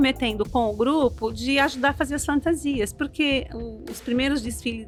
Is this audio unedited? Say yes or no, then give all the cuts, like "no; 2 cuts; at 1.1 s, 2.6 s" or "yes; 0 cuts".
yes; 0 cuts